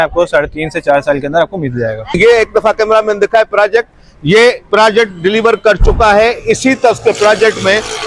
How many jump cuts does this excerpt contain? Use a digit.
1